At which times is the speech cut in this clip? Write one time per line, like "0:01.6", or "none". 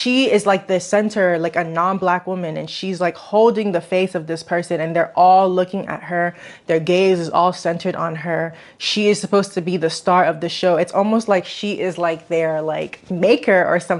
none